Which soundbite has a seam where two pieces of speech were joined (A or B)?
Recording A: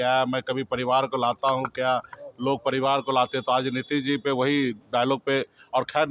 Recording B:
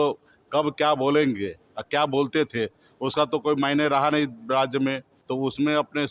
B